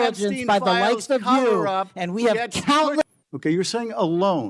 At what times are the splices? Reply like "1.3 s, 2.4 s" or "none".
3.0 s